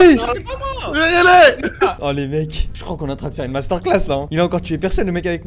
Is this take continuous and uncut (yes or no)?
yes